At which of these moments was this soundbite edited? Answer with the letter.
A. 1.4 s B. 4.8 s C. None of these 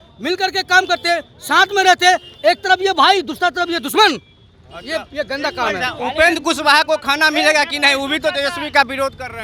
C